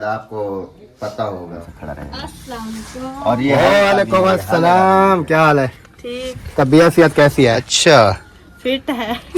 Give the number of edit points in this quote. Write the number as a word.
two